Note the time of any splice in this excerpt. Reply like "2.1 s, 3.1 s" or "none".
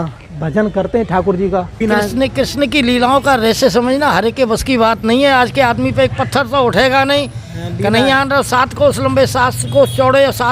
1.8 s

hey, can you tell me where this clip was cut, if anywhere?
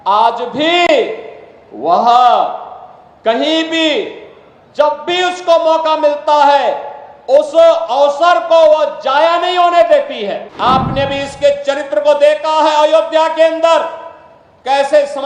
10.5 s

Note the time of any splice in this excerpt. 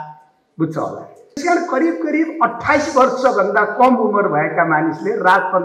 1.4 s

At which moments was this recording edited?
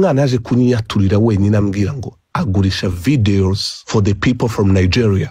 3.7 s

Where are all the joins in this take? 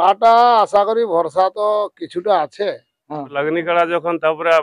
3.3 s

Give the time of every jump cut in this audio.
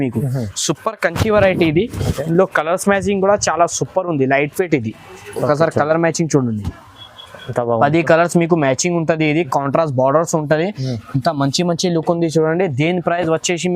none

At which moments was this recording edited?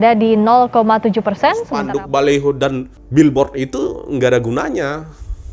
1.7 s, 3.0 s

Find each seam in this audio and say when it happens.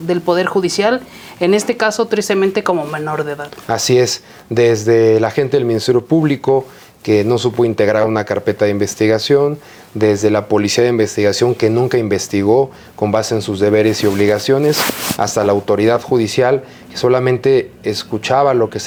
none

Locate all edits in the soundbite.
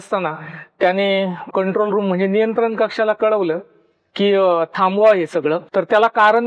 1.4 s, 5.6 s

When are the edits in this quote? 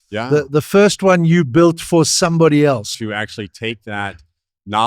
2.9 s

